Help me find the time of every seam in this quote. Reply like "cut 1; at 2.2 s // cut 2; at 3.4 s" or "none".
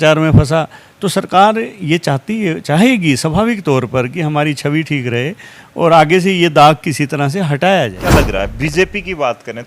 cut 1; at 8.0 s